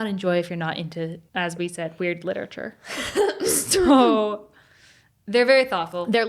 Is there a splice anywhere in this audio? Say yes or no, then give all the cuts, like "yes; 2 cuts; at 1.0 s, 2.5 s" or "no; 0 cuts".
yes; 1 cut; at 1.2 s